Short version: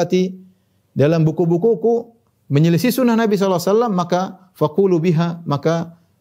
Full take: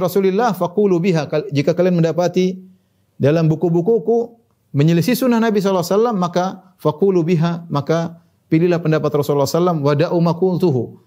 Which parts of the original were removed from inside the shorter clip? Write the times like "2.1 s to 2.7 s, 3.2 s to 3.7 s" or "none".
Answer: none